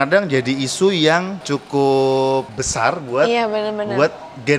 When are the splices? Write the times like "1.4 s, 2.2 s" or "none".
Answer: 1.4 s, 2.6 s